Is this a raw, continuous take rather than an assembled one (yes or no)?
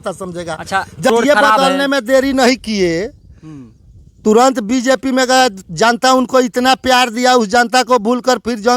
no